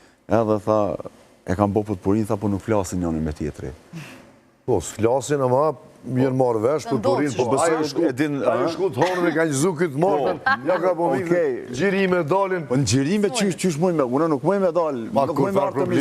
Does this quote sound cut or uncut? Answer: uncut